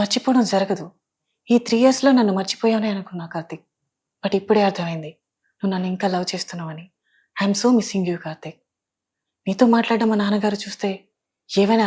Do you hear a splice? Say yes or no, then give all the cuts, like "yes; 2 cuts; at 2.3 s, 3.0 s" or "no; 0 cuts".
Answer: no; 0 cuts